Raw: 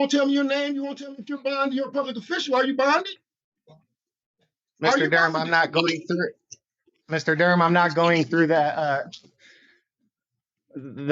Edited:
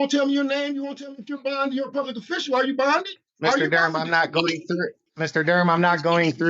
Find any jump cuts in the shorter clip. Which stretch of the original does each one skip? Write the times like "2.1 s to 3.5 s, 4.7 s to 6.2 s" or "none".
3.2 s to 4.6 s, 6.4 s to 7.0 s